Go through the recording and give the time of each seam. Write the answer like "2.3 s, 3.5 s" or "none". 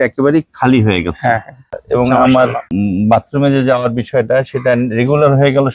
1.6 s, 2.6 s